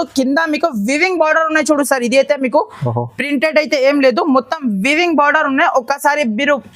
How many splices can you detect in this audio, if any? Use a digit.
0